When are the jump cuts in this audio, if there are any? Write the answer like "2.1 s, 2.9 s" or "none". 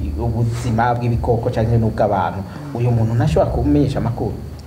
none